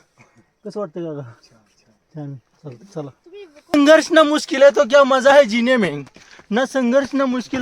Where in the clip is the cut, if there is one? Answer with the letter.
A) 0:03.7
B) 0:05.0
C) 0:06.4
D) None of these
A